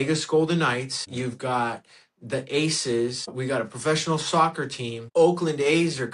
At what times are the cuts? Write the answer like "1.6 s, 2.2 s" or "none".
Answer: 1.0 s, 3.3 s, 4.9 s